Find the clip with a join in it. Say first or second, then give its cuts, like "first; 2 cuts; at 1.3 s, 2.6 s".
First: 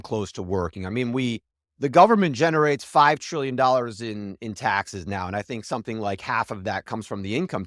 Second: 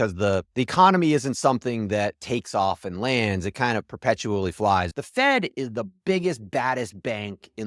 second; 1 cut; at 4.9 s